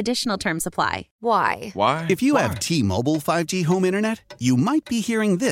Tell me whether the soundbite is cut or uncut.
cut